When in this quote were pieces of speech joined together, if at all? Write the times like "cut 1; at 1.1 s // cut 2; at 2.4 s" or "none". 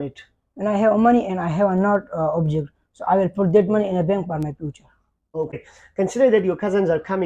none